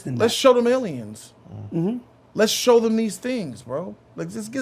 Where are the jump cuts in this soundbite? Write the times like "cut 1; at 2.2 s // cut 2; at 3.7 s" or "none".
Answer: none